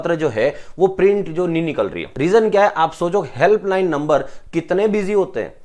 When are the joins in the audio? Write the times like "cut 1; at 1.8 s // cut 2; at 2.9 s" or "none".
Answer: cut 1; at 2.1 s